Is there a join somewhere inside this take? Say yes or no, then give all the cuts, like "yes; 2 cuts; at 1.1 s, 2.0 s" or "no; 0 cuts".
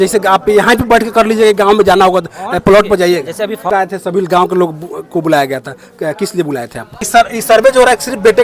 yes; 2 cuts; at 3.7 s, 7.1 s